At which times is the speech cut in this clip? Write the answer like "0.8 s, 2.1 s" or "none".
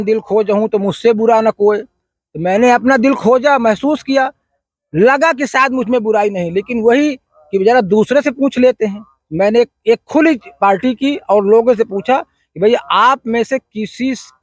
none